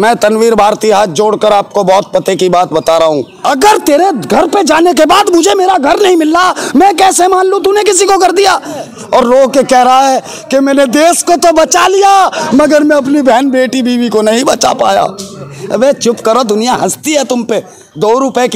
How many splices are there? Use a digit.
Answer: 3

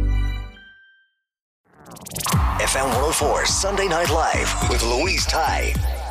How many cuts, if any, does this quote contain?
1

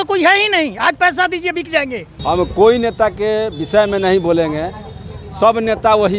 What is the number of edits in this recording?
1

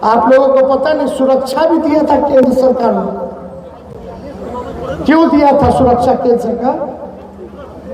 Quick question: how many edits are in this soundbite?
0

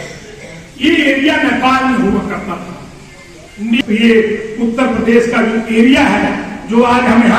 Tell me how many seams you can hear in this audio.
1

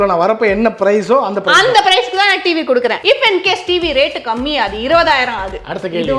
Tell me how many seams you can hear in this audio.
1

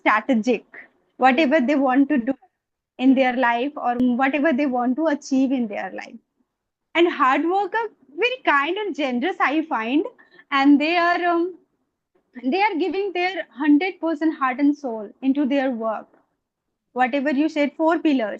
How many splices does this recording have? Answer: 1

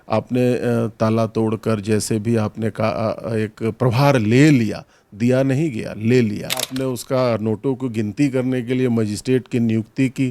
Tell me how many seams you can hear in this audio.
1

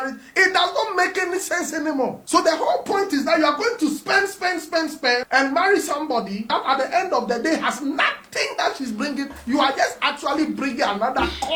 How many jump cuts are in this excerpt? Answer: 0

